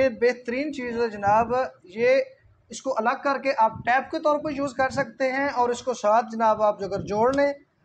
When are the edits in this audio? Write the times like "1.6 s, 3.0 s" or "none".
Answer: none